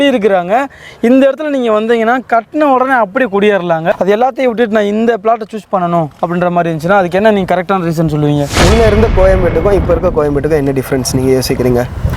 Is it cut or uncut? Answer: cut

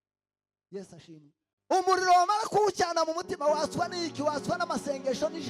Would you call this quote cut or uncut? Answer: uncut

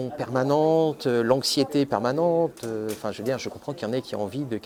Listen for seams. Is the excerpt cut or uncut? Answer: uncut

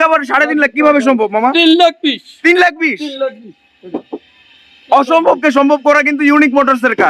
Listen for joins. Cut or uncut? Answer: uncut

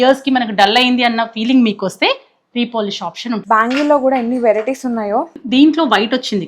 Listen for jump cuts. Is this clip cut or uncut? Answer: cut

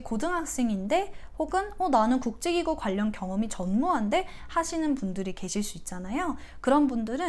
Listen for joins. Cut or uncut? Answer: uncut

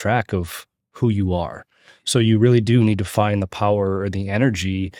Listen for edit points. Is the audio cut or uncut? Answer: uncut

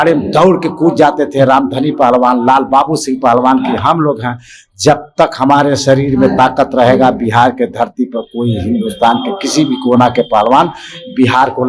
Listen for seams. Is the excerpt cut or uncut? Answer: uncut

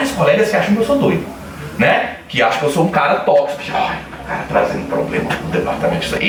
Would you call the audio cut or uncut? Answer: uncut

